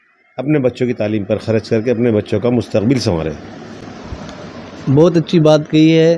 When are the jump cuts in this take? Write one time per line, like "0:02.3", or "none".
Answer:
none